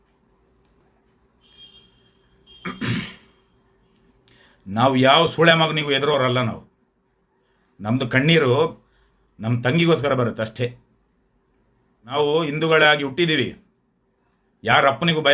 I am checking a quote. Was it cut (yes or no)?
yes